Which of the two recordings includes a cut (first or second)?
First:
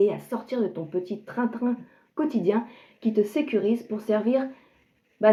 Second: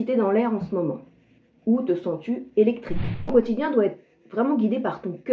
second